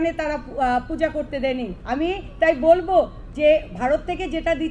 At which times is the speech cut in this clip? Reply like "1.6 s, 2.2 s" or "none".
1.8 s